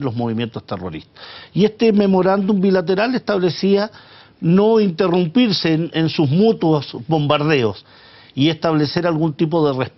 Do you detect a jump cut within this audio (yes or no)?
no